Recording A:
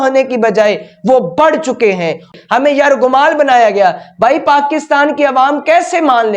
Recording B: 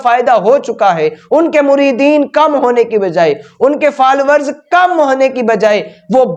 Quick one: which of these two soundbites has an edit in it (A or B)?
A